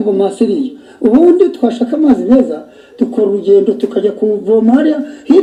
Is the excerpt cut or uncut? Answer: uncut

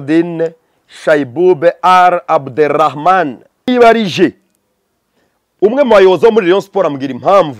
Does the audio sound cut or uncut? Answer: cut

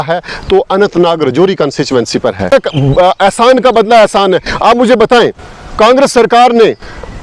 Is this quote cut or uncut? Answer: cut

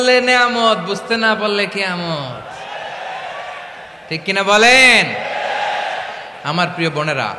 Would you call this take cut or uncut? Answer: uncut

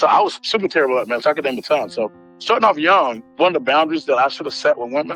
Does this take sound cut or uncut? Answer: cut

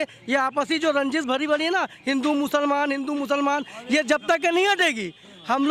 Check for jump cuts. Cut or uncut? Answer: uncut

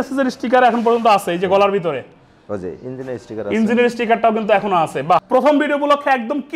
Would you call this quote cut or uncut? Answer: cut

